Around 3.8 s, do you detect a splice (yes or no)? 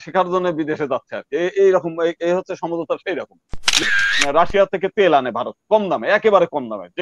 yes